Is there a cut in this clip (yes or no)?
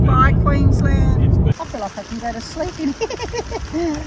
yes